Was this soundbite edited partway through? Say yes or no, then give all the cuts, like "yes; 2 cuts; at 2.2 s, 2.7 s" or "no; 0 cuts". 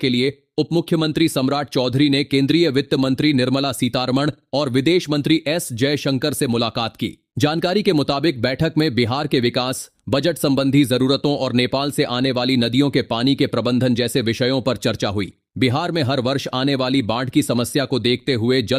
no; 0 cuts